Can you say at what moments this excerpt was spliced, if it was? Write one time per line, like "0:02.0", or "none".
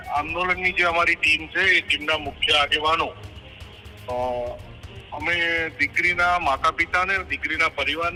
none